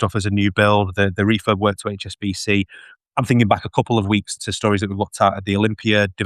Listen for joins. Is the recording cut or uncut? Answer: cut